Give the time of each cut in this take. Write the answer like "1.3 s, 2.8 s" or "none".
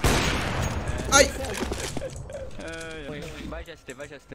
3.1 s